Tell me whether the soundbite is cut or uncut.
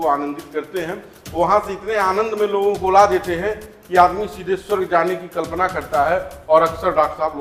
uncut